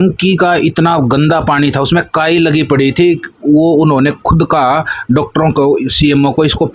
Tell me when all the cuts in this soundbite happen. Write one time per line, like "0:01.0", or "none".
none